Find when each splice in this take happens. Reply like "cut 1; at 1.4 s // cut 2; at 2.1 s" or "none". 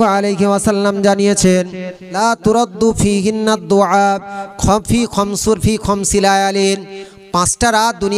cut 1; at 2.2 s